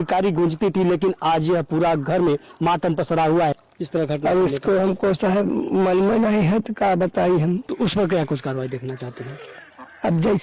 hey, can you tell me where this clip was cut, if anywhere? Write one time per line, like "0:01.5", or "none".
0:03.7
0:07.7